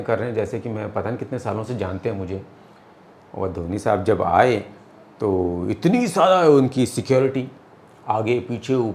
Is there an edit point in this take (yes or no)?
no